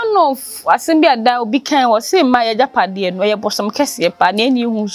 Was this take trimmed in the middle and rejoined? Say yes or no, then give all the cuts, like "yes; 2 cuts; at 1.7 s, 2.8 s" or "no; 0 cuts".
no; 0 cuts